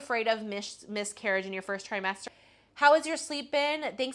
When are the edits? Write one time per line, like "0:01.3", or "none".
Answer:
0:02.2